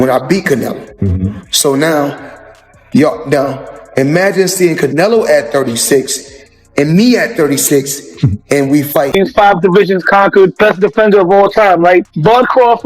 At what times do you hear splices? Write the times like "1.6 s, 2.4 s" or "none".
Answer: 9.1 s